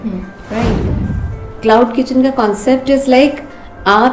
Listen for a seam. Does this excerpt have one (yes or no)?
yes